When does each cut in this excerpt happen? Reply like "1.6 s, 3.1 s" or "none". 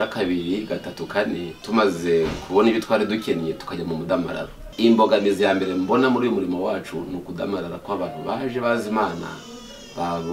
1.5 s, 4.6 s